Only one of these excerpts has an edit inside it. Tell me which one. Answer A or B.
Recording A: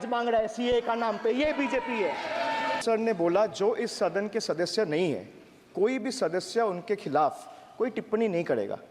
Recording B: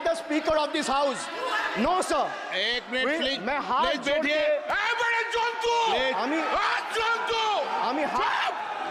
A